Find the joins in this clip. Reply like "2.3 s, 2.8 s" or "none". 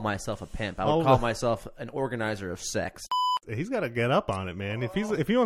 3.0 s